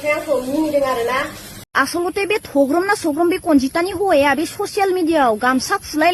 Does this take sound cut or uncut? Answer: cut